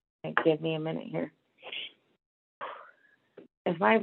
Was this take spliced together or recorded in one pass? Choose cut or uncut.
cut